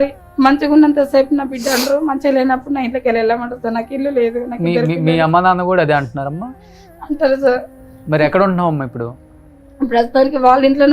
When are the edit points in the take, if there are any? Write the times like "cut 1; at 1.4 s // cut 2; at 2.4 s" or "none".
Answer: none

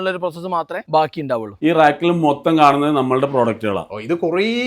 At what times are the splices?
cut 1; at 1.5 s

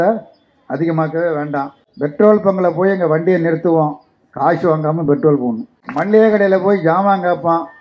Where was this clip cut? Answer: cut 1; at 1.8 s // cut 2; at 5.8 s

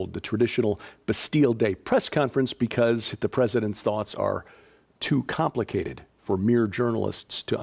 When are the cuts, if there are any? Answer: cut 1; at 1.8 s

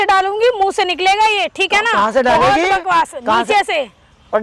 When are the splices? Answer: none

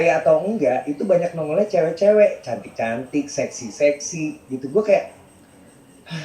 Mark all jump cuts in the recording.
none

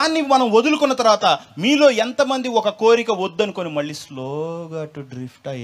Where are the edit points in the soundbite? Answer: none

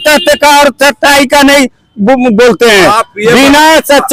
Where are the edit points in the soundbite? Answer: none

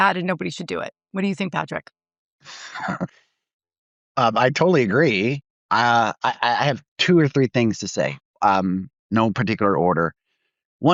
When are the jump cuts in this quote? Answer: none

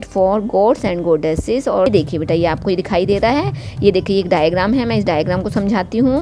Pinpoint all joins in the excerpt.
cut 1; at 1.9 s

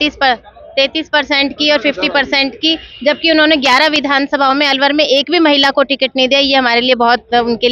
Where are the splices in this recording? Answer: none

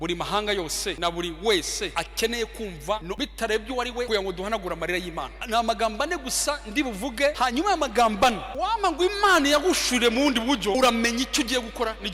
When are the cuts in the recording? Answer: cut 1; at 1.0 s // cut 2; at 1.9 s // cut 3; at 3.1 s // cut 4; at 4.1 s // cut 5; at 5.4 s // cut 6; at 7.4 s // cut 7; at 8.5 s // cut 8; at 10.8 s

